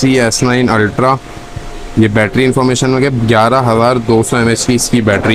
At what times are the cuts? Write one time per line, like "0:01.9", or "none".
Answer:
none